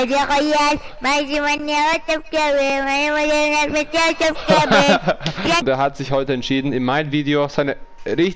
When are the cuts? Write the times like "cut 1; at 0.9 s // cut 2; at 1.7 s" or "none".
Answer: cut 1; at 5.6 s